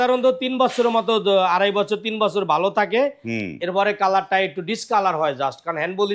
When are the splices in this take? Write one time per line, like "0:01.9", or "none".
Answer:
none